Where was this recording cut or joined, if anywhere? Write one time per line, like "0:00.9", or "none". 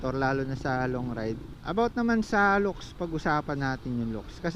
0:01.5